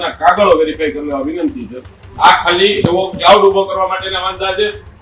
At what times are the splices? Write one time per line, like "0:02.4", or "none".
0:02.0